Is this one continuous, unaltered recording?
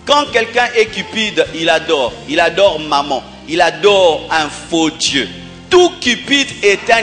yes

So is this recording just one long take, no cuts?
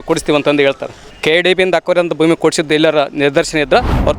no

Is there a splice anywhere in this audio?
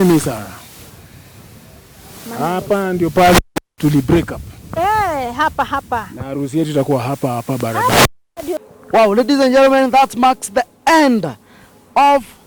yes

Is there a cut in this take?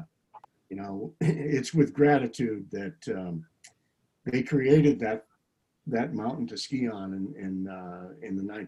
no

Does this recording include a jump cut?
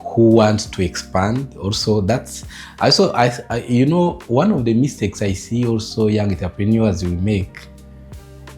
no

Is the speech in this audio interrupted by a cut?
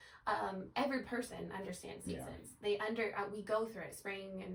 no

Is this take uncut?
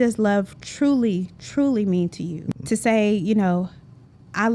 no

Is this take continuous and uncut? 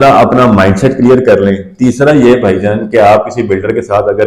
yes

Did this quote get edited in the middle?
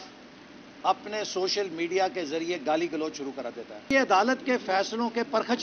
yes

